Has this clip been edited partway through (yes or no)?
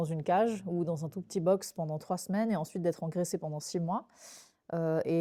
no